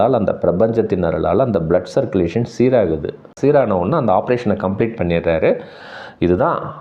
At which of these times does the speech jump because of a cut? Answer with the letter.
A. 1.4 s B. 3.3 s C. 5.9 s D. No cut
B